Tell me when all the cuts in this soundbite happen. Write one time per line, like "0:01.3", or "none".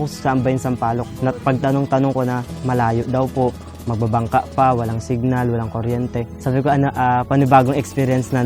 0:01.1
0:06.3

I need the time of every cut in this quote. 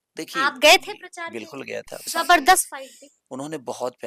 0:02.1

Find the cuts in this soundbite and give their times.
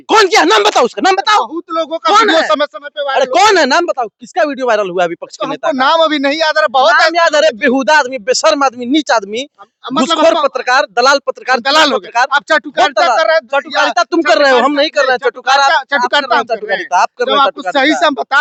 none

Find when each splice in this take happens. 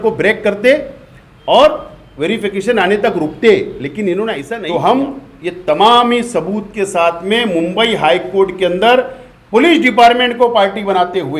0:04.5

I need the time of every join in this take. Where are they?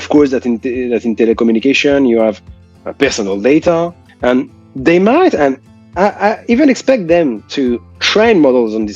0:04.0

